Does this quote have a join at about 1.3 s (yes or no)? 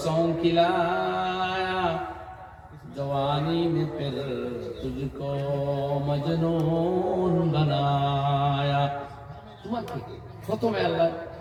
no